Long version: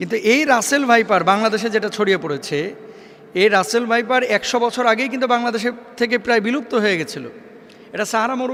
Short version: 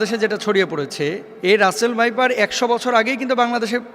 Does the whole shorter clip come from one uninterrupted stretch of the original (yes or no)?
no